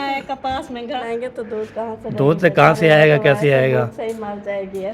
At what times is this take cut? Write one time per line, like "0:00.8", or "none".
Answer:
0:01.0